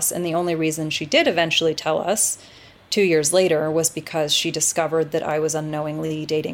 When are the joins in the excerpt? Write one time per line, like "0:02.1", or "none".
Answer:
none